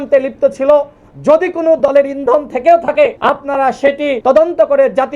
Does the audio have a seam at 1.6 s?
no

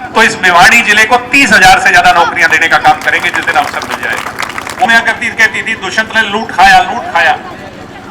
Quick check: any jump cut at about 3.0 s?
no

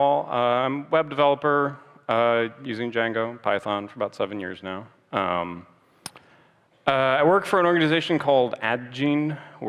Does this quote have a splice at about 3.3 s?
no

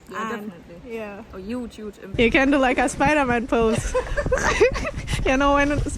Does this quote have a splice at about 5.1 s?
yes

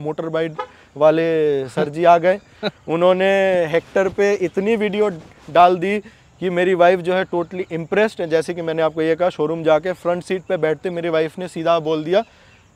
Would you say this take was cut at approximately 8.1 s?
no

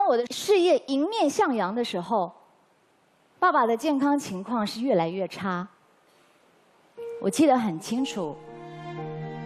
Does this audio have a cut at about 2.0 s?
no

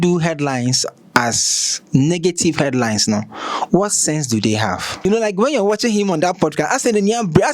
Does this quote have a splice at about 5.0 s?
yes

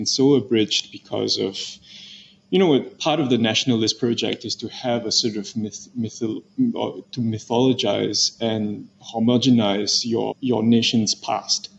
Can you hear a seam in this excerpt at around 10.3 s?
yes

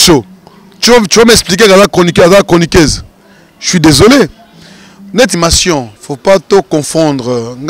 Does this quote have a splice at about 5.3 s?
yes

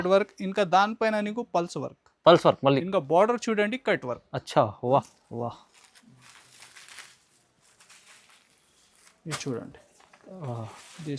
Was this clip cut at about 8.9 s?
no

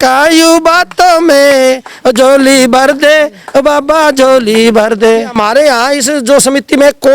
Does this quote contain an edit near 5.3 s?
yes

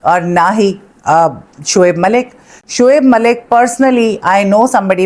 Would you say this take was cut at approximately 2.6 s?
no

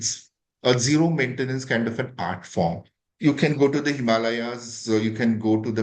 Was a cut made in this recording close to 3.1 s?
yes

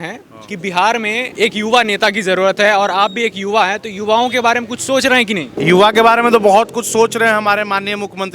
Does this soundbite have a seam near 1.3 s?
yes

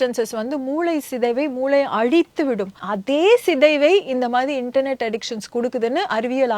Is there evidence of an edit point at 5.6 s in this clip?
no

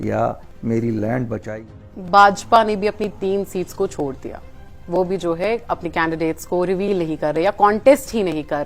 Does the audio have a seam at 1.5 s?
yes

